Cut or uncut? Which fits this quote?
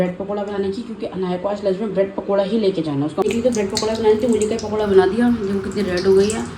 cut